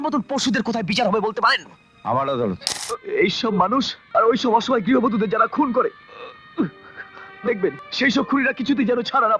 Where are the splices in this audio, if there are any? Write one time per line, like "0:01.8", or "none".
0:02.7
0:04.0
0:07.9